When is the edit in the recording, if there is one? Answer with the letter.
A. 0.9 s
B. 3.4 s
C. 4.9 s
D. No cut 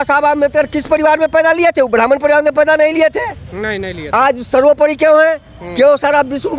D